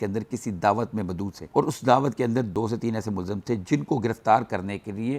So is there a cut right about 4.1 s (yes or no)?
no